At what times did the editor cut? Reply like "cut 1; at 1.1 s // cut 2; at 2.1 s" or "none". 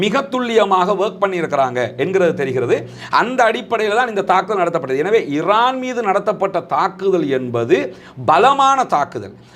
none